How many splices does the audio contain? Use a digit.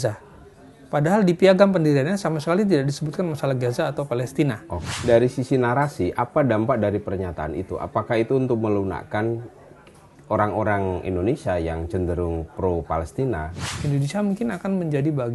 2